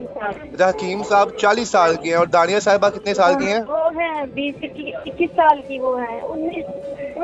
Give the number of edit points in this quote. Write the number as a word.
zero